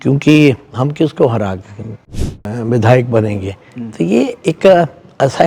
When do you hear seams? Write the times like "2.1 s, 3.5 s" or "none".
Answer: 2.2 s